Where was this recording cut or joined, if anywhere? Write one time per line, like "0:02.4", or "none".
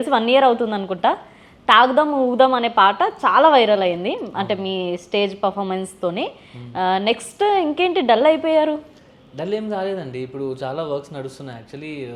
none